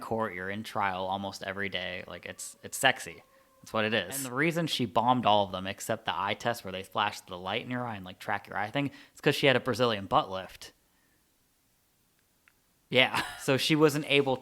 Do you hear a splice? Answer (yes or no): yes